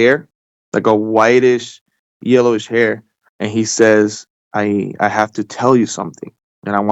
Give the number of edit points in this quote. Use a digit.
1